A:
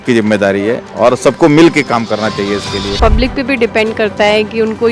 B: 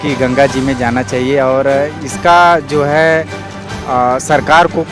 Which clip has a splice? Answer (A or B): A